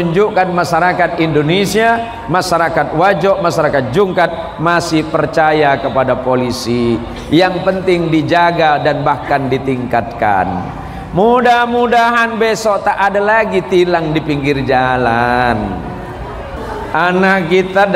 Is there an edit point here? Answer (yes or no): yes